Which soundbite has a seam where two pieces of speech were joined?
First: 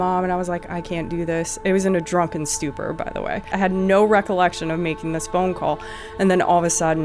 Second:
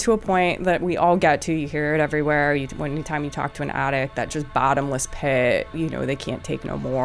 first; 1 cut; at 3.5 s

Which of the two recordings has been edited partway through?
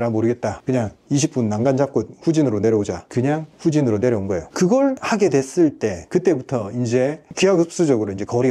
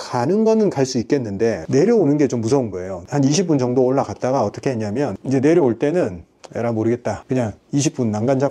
second; 1 cut; at 3.0 s

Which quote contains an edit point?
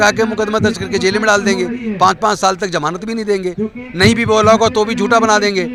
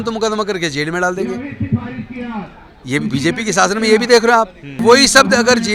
second; 1 cut; at 4.6 s

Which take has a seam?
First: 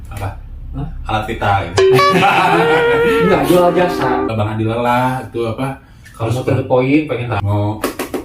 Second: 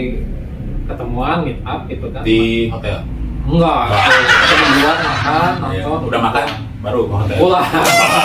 first; 2 cuts; at 4.3 s, 7.3 s

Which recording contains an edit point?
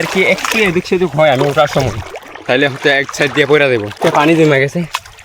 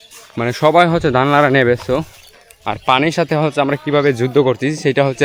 first; 1 cut; at 4.0 s

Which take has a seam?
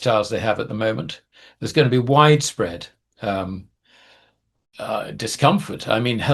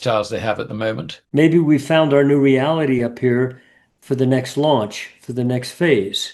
second; 1 cut; at 1.1 s

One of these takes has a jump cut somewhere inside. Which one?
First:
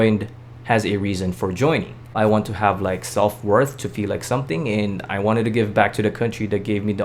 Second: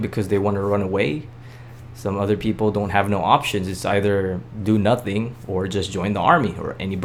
first; 1 cut; at 2.1 s

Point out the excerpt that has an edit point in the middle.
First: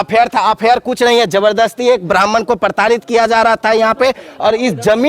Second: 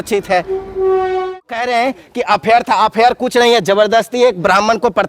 second; 1 cut; at 1.4 s

